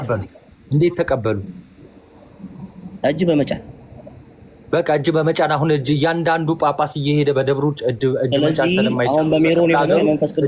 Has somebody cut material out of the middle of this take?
no; 0 cuts

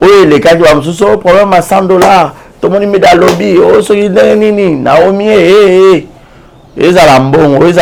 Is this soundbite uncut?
yes; 0 cuts

